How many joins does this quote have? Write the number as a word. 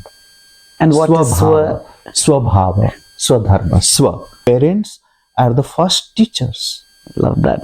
one